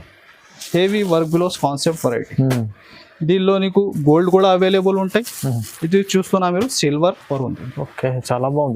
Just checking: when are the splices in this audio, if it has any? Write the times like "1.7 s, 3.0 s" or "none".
7.2 s